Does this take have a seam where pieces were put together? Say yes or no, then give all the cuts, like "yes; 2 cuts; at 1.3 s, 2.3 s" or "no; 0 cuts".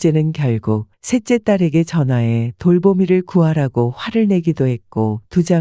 yes; 1 cut; at 0.9 s